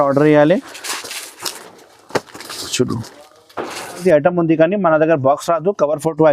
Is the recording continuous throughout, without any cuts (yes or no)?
no